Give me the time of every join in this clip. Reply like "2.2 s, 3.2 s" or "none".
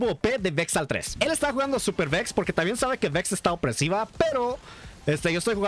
1.1 s